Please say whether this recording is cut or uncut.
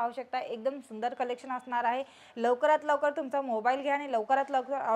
uncut